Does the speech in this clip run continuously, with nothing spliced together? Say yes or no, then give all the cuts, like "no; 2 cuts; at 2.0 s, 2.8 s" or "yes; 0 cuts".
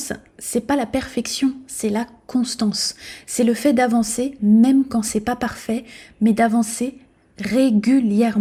yes; 0 cuts